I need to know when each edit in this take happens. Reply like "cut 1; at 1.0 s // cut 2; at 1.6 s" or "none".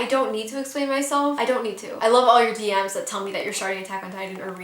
cut 1; at 2.0 s